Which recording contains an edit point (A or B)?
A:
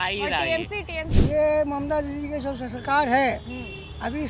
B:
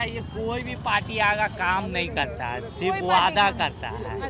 A